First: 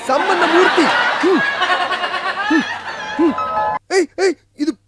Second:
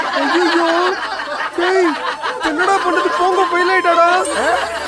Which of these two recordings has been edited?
first; 1 cut; at 3.8 s

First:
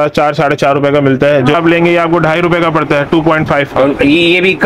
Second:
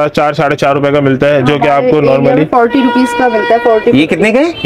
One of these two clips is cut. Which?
first; 1 cut; at 1.6 s

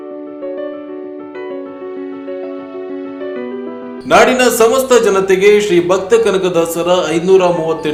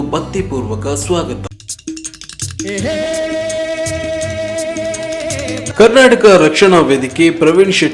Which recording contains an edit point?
second; 1 cut; at 1.6 s

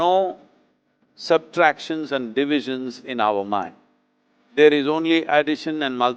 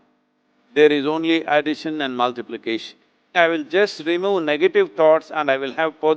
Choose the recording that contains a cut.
second; 1 cut; at 3.3 s

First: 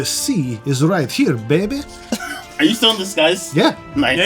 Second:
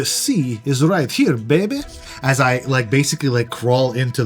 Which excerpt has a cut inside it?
second; 1 cut; at 2.1 s

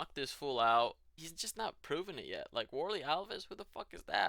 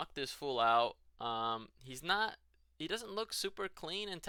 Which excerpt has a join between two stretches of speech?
first; 1 cut; at 1.1 s

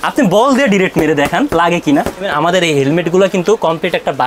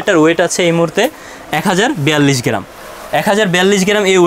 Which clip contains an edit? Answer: first; 1 cut; at 2.3 s

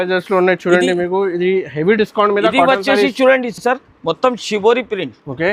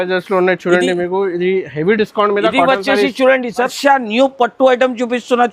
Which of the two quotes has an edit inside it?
second; 1 cut; at 3.6 s

